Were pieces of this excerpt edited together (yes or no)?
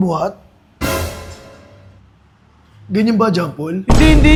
no